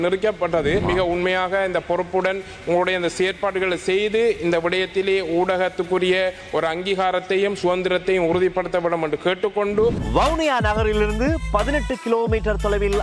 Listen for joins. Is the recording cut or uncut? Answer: cut